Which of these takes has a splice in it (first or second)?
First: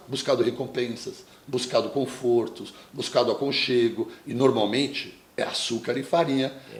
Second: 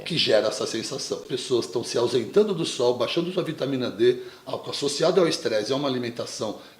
second